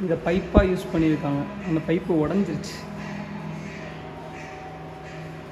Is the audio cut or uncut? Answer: uncut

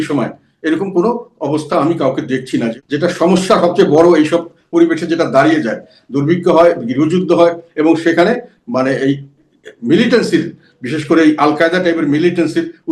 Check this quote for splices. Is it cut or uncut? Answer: cut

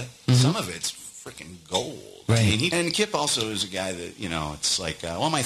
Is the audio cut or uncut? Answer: cut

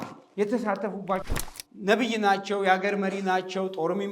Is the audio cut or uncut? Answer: cut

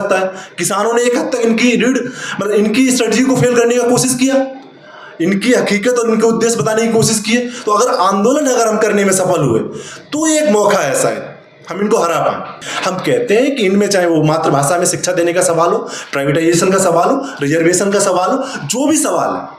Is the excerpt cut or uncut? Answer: cut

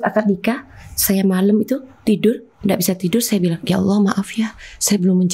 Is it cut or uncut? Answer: uncut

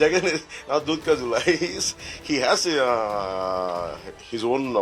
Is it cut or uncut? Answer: uncut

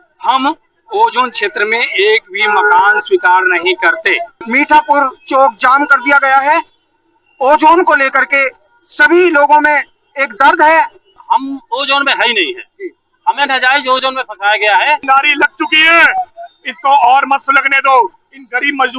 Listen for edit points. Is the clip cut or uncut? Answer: cut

